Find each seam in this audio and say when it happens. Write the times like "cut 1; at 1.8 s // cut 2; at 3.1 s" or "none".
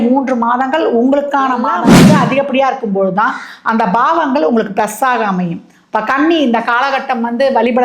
cut 1; at 2.0 s